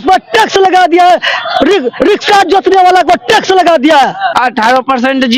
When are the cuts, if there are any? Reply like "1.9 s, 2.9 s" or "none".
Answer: 4.2 s